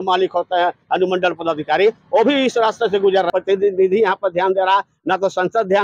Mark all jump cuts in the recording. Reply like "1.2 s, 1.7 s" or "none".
3.3 s